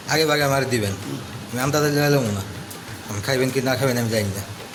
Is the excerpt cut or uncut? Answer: uncut